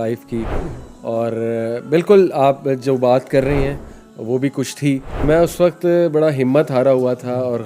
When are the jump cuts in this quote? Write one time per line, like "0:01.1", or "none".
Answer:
0:05.2